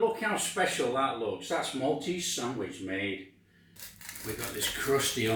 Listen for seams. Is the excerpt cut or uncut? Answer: uncut